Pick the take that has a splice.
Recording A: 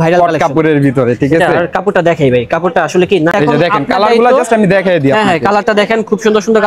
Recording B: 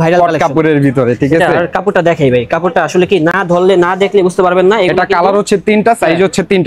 A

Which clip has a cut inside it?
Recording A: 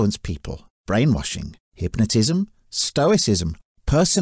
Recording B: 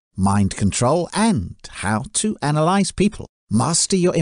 B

